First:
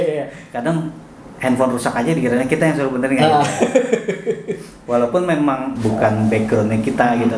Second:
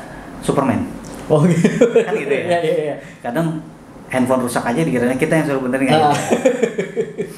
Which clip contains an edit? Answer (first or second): first